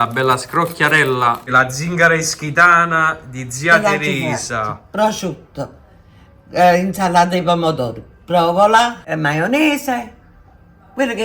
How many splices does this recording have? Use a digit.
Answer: 2